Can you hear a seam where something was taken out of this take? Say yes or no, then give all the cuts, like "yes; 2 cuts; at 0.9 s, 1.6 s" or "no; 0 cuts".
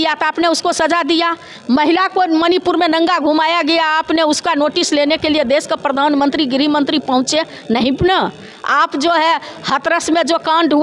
no; 0 cuts